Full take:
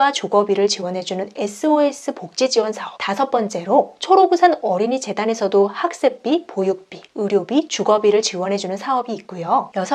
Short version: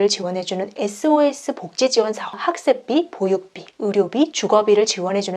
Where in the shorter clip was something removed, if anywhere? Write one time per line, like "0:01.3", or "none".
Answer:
0:02.4